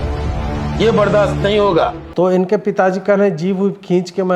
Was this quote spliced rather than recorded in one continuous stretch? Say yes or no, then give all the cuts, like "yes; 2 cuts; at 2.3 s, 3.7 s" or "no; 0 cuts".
no; 0 cuts